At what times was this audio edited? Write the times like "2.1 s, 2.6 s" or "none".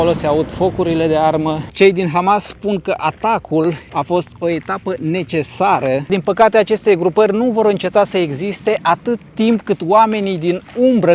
1.7 s, 3.9 s, 6.0 s